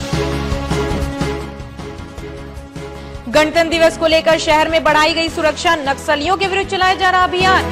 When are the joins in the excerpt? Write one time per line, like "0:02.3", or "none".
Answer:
0:01.0